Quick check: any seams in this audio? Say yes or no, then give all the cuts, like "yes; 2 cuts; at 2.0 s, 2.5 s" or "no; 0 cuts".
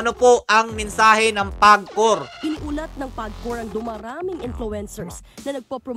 yes; 1 cut; at 2.3 s